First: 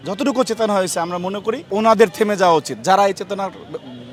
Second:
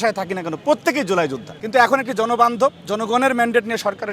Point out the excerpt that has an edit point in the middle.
second; 1 cut; at 1.5 s

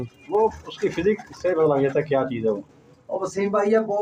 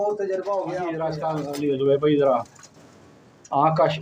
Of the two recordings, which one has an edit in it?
second; 1 cut; at 1.0 s

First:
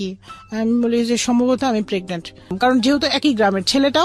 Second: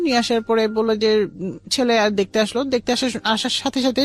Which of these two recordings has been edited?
first; 1 cut; at 2.5 s

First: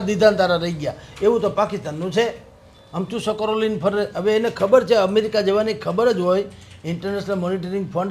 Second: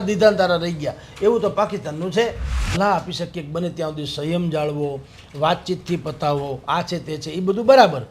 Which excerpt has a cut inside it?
second; 1 cut; at 2.7 s

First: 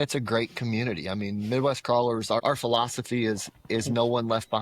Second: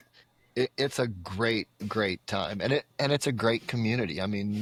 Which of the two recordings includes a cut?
first; 1 cut; at 2.4 s

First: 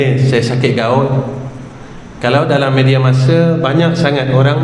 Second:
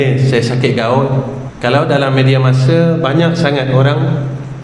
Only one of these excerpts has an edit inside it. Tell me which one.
second; 1 cut; at 1.4 s

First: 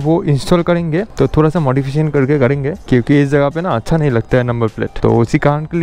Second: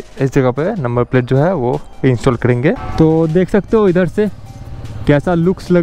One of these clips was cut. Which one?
second; 1 cut; at 2.8 s

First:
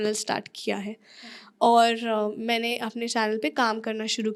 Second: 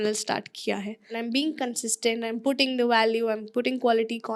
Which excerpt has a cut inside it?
second; 1 cut; at 1.1 s

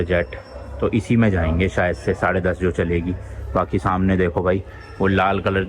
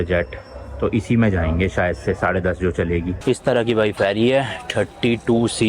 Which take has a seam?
second; 1 cut; at 3.2 s

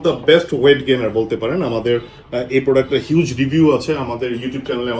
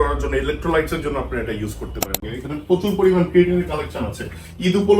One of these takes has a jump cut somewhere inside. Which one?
second; 1 cut; at 2.3 s

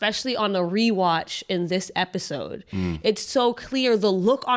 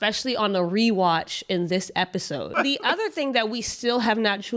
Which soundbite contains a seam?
second; 1 cut; at 2.5 s

